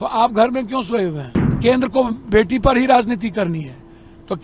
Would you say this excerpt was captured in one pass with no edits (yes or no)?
no